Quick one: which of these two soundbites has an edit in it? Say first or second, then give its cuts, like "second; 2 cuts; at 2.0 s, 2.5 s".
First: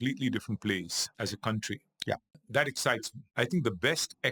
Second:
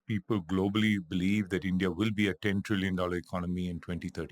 first; 3 cuts; at 1.0 s, 2.4 s, 3.2 s